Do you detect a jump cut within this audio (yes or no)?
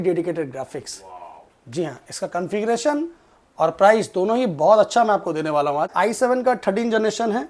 yes